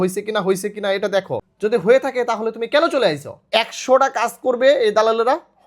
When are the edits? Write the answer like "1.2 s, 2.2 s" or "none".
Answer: 1.4 s, 3.4 s